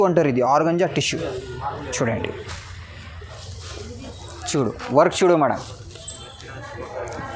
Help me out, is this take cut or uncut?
cut